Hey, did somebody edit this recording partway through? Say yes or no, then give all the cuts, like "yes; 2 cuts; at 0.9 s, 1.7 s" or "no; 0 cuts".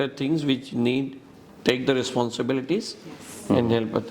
no; 0 cuts